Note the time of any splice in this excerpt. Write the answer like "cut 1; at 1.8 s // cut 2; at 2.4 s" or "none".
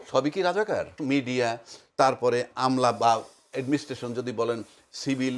cut 1; at 1.0 s